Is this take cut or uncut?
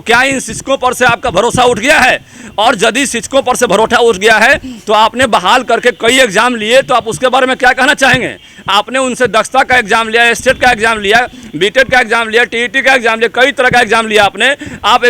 uncut